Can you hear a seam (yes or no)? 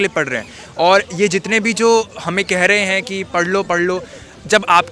no